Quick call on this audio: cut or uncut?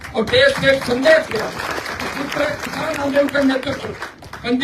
uncut